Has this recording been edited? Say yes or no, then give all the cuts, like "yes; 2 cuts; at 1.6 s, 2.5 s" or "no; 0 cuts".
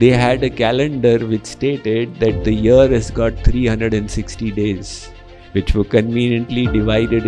no; 0 cuts